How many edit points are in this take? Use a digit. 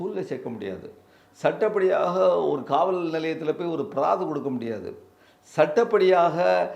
0